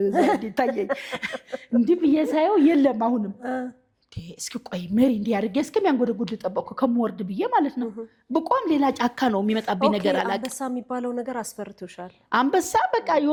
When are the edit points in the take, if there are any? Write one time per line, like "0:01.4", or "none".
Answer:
none